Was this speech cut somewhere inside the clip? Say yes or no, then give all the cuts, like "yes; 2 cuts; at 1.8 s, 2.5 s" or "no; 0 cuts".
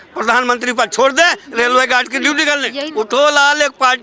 yes; 1 cut; at 2.8 s